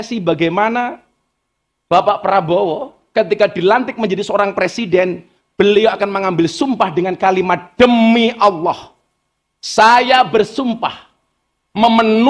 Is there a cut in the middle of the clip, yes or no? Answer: no